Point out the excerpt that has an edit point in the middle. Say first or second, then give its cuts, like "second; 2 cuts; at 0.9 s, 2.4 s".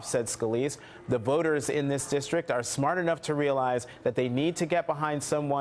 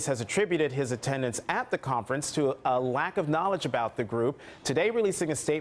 second; 1 cut; at 3.1 s